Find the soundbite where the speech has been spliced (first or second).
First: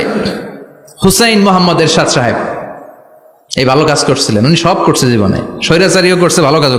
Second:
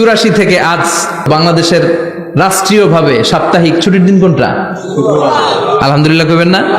second